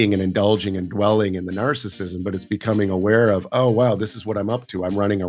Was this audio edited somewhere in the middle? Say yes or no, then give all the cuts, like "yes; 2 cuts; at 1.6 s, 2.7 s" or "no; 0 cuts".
no; 0 cuts